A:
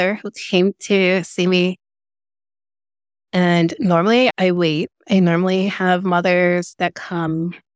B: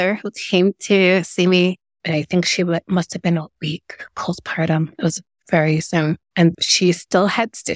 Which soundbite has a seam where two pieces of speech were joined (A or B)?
B